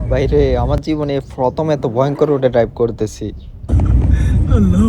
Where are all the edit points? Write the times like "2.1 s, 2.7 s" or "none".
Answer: 3.7 s